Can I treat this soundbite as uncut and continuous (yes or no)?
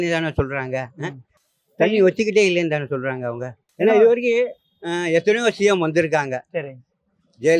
yes